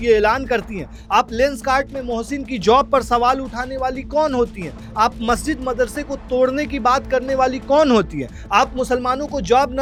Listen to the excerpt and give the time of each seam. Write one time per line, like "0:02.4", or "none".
none